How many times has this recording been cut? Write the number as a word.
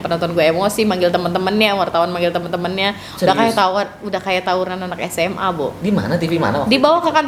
zero